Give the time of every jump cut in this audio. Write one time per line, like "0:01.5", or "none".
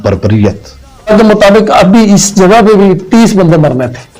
0:01.1